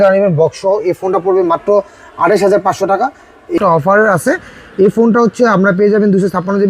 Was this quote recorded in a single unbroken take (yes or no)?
no